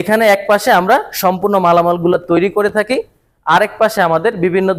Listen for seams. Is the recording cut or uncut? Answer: uncut